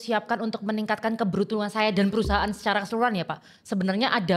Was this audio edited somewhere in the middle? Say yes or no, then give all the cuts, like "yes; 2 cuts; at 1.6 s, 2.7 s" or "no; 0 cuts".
no; 0 cuts